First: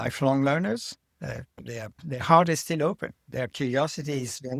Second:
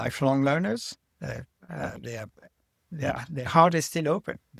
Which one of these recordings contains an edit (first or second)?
first